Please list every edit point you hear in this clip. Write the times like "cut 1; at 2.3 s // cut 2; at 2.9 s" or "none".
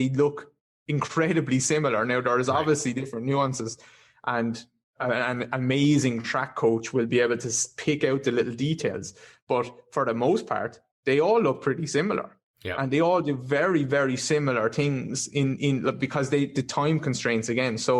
none